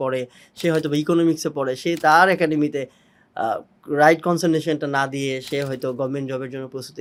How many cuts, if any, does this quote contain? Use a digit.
0